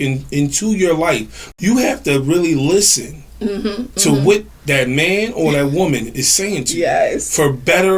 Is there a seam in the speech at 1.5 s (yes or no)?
yes